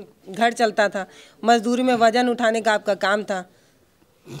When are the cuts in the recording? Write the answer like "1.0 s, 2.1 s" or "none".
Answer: none